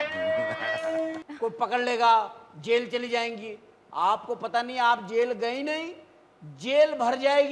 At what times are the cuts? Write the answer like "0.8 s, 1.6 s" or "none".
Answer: 1.2 s